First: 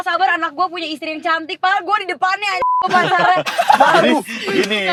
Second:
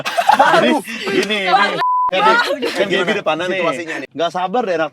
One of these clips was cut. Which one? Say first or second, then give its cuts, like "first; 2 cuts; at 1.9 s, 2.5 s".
second; 1 cut; at 4.0 s